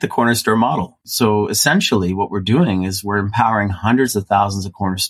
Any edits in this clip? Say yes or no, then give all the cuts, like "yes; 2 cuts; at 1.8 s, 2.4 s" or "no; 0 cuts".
yes; 1 cut; at 0.9 s